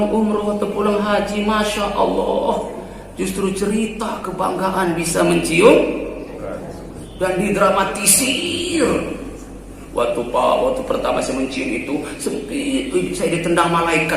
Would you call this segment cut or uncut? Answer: uncut